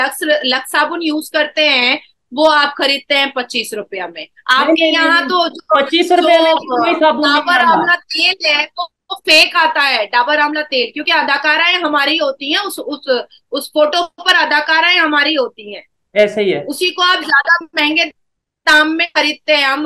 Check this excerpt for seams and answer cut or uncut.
uncut